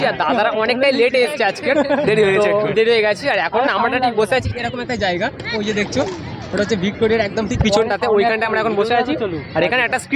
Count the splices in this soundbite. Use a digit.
0